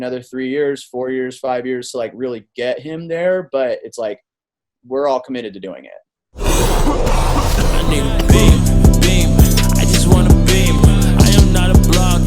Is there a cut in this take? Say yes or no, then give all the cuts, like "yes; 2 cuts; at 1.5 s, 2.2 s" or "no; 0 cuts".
yes; 1 cut; at 6.3 s